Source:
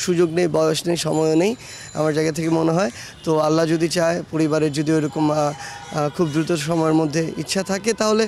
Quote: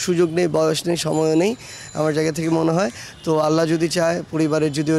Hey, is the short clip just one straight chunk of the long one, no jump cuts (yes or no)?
yes